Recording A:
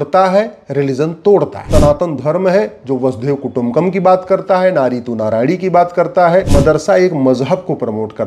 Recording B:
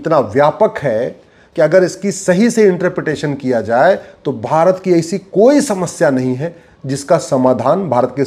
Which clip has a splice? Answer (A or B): A